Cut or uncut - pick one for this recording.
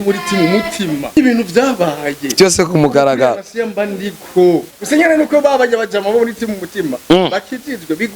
cut